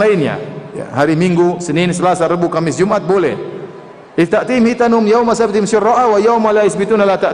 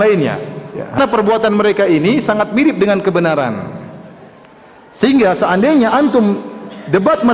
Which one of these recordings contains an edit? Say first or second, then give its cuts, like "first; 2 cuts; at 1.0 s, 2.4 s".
second; 1 cut; at 1.0 s